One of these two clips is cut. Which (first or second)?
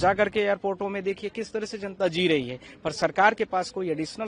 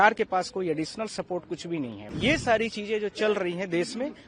second